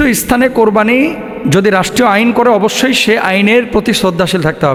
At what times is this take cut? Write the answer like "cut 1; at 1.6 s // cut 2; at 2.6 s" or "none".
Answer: none